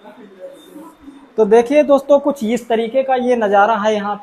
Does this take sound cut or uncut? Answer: uncut